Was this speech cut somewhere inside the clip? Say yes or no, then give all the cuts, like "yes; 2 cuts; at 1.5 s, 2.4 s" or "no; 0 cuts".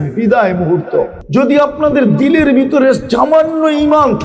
yes; 1 cut; at 1.2 s